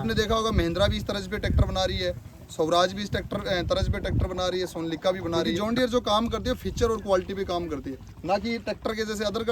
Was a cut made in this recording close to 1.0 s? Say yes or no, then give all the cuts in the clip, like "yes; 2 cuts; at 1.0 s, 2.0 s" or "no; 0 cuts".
no; 1 cut; at 5.5 s